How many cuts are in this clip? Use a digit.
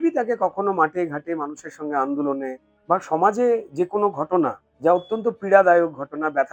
2